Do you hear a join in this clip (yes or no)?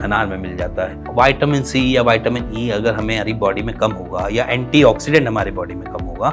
yes